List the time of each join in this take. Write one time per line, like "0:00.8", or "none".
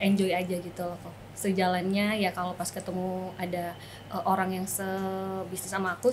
none